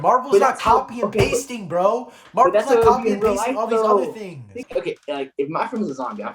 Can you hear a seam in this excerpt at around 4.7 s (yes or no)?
yes